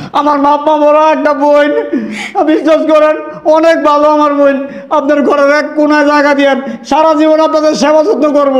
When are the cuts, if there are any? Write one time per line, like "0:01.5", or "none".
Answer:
none